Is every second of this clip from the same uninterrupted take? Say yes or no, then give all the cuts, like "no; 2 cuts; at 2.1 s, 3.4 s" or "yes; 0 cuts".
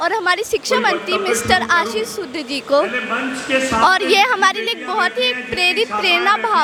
yes; 0 cuts